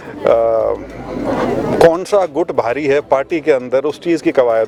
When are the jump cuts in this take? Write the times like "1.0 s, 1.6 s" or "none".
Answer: none

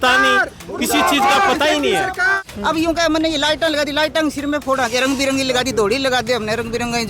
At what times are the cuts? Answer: 2.5 s

